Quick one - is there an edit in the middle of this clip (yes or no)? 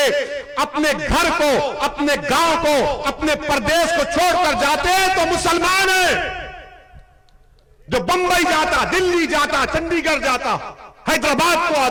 no